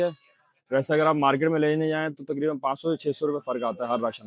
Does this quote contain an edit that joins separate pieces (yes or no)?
no